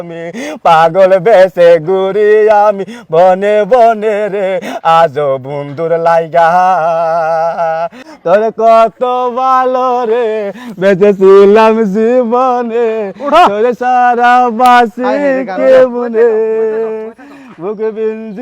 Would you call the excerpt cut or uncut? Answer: cut